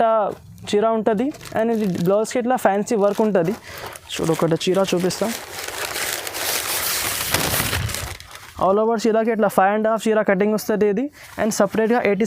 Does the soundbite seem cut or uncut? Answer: uncut